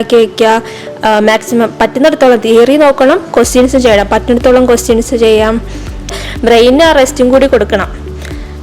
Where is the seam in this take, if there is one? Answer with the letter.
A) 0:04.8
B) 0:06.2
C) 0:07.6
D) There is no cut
B